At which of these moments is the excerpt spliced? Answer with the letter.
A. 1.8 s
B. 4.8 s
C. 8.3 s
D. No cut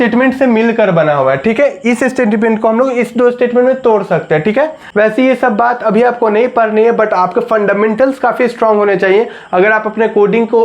B